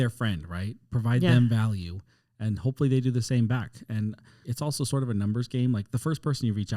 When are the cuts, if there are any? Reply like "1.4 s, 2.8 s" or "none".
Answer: 4.4 s